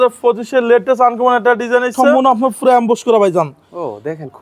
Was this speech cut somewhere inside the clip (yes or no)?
yes